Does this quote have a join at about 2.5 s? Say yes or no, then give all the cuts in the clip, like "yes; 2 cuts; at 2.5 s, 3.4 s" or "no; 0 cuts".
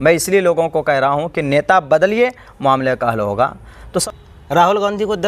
no; 1 cut; at 4.0 s